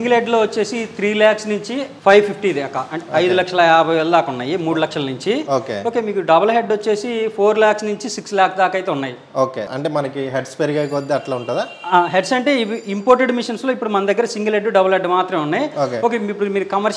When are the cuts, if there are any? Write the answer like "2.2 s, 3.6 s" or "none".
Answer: none